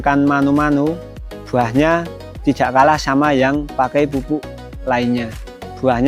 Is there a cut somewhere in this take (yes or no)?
no